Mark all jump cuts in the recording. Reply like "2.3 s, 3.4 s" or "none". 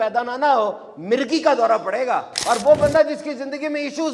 2.3 s